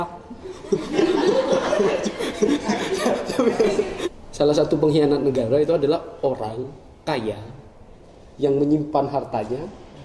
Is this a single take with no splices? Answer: no; 1 cut; at 3.9 s

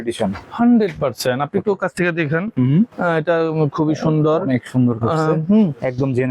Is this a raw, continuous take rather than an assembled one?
yes; 0 cuts

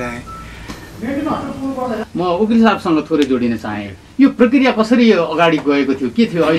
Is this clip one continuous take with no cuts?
no; 1 cut; at 2.1 s

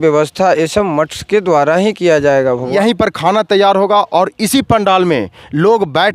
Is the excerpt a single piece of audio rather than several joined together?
no; 1 cut; at 2.7 s

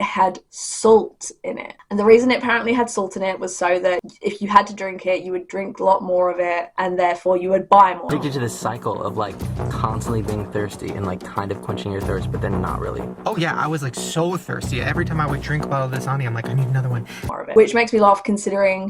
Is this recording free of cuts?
yes; 0 cuts

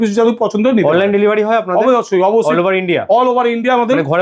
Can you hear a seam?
no; 0 cuts

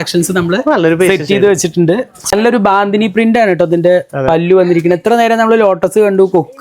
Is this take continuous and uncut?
no; 1 cut; at 2.3 s

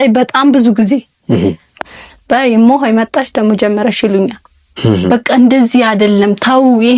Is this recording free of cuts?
no; 1 cut; at 1.8 s

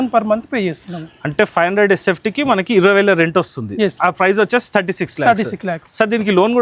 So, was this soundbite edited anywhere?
no; 0 cuts

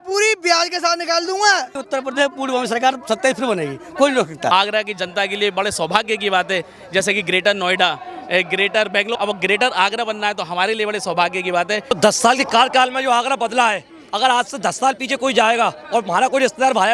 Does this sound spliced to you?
yes; 4 cuts; at 1.8 s, 4.5 s, 9.2 s, 11.9 s

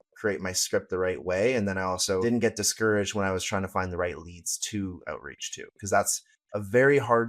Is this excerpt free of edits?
no; 1 cut; at 2.2 s

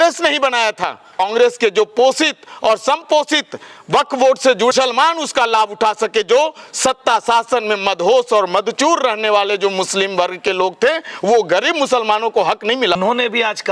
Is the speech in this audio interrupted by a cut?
yes; 3 cuts; at 1.2 s, 4.7 s, 13.0 s

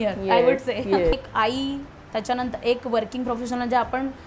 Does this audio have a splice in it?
yes; 1 cut; at 1.1 s

